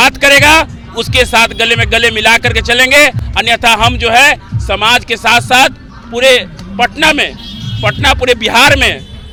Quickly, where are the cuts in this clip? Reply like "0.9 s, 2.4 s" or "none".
none